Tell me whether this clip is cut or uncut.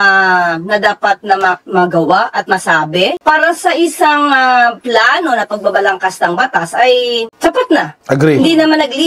uncut